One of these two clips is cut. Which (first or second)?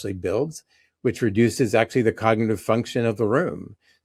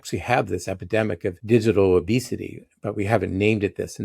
second